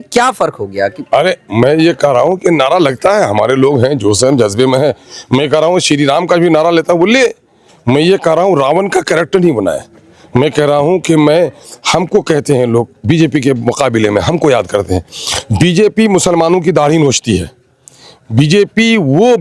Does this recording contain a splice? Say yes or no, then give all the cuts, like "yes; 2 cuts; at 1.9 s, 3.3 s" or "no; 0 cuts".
no; 0 cuts